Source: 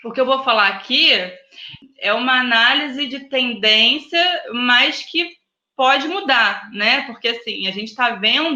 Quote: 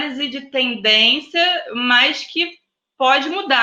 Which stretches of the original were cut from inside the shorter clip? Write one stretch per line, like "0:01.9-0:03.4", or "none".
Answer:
none